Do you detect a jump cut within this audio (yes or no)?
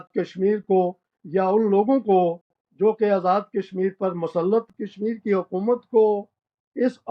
yes